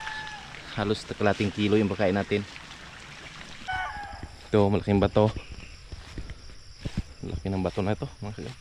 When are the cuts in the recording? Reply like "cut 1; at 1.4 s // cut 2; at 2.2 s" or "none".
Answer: cut 1; at 3.7 s

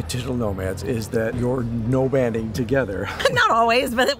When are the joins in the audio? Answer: cut 1; at 1.3 s // cut 2; at 3.1 s

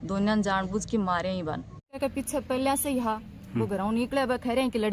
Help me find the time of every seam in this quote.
cut 1; at 2.0 s

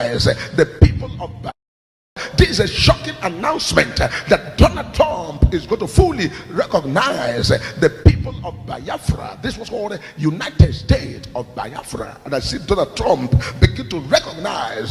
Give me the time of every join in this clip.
cut 1; at 1.6 s

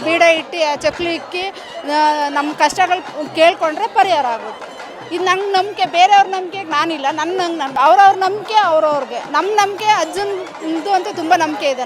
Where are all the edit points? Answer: cut 1; at 7.7 s

